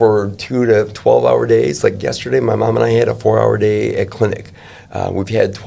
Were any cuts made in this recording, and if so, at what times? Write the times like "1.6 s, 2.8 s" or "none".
none